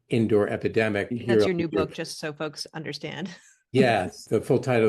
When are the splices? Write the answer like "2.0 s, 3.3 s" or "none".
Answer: 1.1 s